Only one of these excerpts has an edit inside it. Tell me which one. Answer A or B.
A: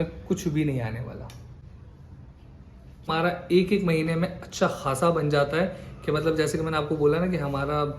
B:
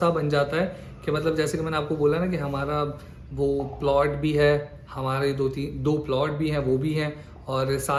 A